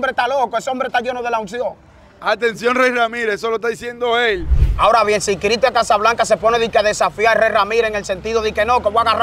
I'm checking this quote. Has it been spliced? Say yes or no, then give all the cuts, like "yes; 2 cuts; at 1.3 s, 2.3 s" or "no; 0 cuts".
yes; 1 cut; at 4.6 s